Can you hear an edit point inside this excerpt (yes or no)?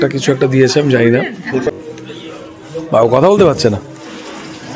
yes